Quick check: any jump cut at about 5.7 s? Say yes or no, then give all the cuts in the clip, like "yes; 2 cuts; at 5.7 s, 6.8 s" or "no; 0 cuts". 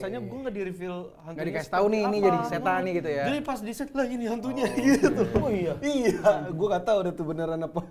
no; 0 cuts